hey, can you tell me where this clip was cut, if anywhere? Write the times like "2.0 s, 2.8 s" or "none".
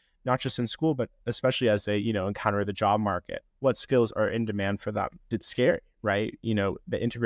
5.4 s